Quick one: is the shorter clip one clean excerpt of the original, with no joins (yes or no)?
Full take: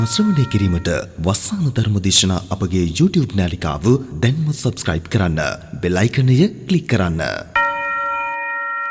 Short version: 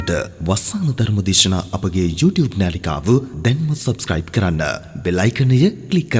yes